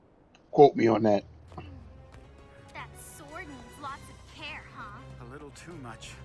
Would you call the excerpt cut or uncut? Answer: cut